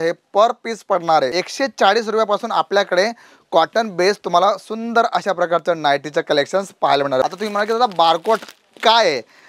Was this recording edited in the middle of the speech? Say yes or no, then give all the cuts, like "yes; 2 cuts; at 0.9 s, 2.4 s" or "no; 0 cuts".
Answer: yes; 2 cuts; at 1.4 s, 7.2 s